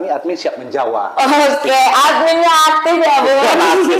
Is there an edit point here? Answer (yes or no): no